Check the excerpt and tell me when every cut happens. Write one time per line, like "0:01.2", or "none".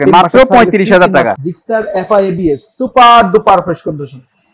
0:01.4